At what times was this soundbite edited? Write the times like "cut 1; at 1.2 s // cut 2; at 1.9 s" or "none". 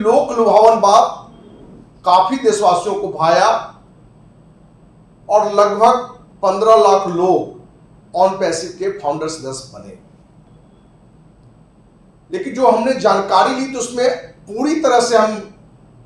cut 1; at 10.5 s